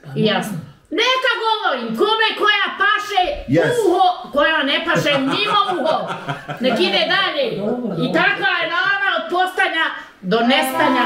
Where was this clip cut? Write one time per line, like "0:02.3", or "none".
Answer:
none